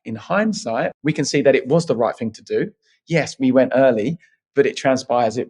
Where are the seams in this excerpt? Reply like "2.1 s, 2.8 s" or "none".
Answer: 1.0 s